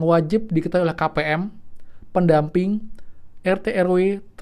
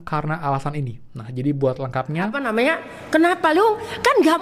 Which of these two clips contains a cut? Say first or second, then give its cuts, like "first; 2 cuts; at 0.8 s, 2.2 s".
second; 1 cut; at 2.4 s